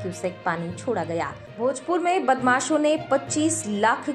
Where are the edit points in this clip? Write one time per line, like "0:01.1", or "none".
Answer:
0:01.5